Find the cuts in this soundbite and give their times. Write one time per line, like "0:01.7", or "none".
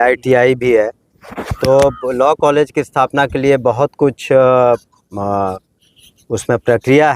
none